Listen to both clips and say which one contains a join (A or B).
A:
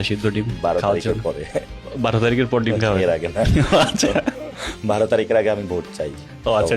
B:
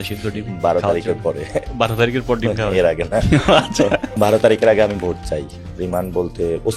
B